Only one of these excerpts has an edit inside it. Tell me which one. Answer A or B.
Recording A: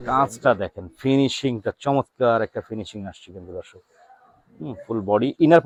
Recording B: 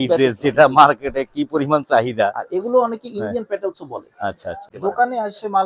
B